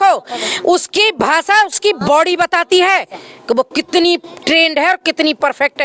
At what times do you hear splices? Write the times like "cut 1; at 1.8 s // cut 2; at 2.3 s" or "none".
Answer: none